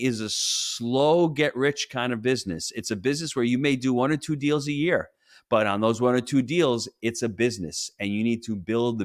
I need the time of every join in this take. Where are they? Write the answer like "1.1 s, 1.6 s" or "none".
none

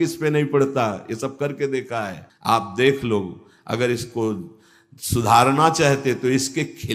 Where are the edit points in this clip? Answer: 2.2 s

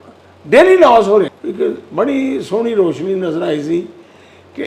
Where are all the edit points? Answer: 1.4 s

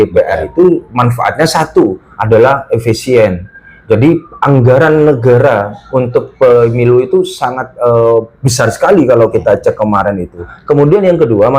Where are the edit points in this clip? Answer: 10.5 s

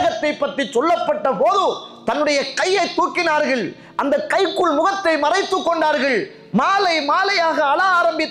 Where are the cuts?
none

